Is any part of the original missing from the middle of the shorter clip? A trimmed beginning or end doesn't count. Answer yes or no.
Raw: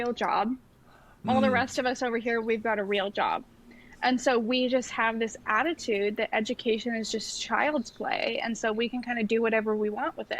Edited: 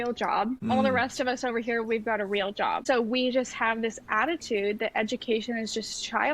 yes